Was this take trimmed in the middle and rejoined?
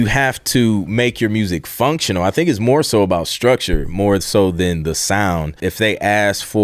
yes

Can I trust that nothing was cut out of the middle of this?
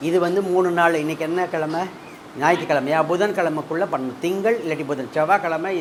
yes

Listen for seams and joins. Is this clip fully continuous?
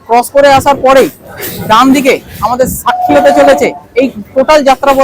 yes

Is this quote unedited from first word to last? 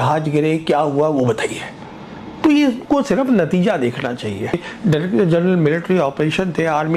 no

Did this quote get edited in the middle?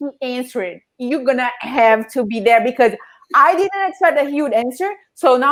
no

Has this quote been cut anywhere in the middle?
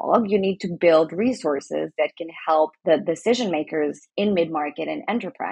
no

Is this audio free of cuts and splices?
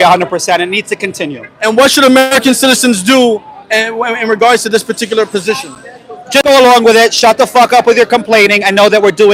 yes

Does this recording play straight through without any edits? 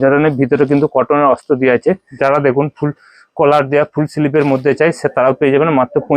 no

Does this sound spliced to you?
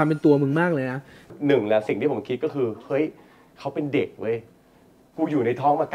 yes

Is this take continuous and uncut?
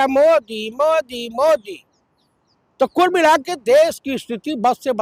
yes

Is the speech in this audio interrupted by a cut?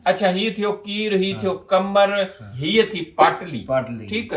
no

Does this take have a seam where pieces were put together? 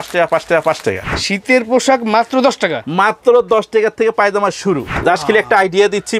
yes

